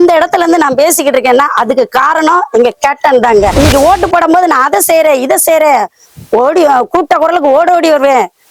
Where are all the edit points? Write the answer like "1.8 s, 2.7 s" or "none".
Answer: 3.5 s